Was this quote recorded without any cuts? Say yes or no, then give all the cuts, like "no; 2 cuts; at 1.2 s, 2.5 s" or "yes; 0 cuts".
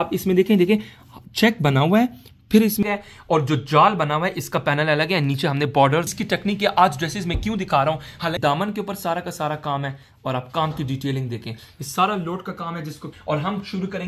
no; 4 cuts; at 2.8 s, 6.1 s, 8.4 s, 13.1 s